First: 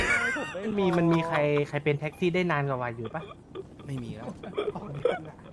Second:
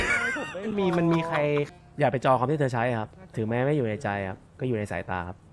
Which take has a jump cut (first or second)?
second